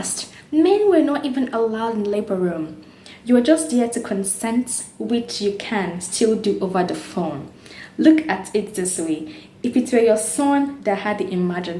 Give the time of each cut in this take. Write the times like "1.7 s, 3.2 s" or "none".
none